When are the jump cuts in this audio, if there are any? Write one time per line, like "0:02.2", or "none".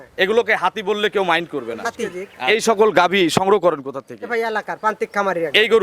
0:02.3